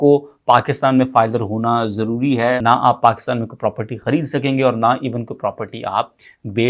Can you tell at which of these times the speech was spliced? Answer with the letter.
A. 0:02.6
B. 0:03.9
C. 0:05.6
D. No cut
A